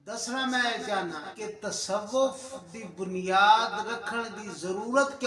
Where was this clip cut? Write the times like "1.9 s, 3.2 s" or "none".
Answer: 1.3 s